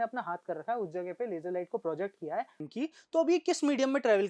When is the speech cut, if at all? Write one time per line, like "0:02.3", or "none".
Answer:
0:02.6